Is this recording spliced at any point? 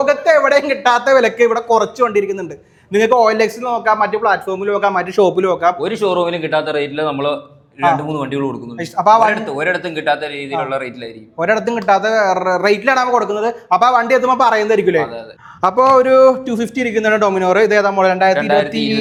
no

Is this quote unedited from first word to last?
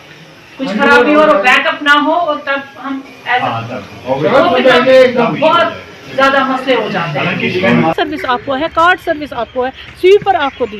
no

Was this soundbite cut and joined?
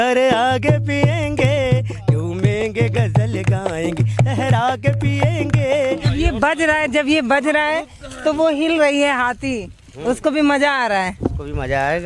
yes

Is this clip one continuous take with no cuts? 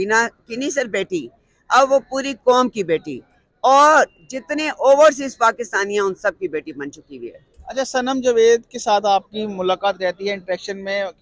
yes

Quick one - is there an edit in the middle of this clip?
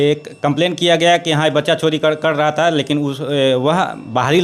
no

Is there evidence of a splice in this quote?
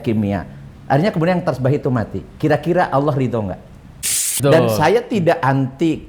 yes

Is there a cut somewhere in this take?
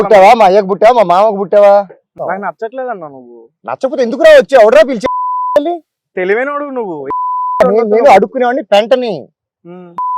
yes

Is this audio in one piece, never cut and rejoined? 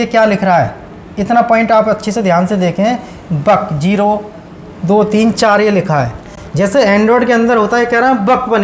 yes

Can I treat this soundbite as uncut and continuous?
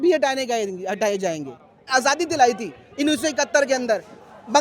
no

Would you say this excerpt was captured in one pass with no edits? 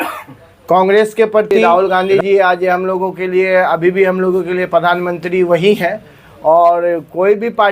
no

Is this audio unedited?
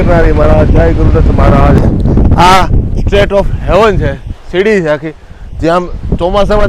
no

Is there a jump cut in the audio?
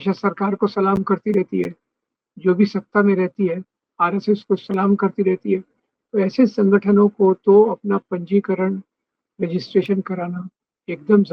no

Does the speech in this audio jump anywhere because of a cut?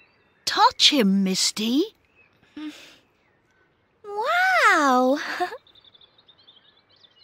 no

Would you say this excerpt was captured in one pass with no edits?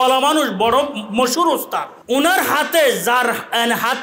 no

